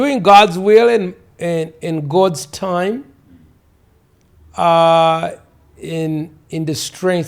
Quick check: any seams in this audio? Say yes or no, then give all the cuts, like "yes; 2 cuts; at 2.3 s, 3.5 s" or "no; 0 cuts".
no; 0 cuts